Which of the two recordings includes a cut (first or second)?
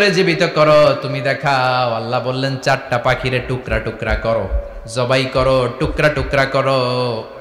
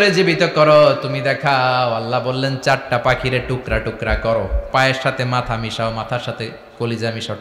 second